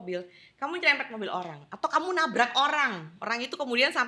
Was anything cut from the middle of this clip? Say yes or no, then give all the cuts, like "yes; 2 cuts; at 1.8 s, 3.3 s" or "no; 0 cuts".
no; 0 cuts